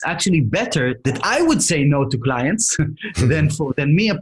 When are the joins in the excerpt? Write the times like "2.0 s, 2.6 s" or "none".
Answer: 1.0 s